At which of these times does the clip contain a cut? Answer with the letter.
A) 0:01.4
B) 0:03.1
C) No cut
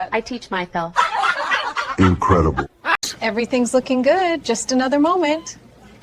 B